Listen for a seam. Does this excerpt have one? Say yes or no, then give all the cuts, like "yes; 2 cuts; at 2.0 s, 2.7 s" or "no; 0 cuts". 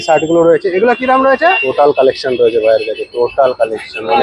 yes; 1 cut; at 1.7 s